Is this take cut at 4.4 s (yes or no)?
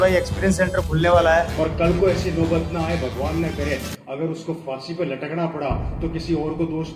no